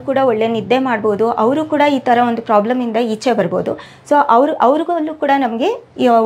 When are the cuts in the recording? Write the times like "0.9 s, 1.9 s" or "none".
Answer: none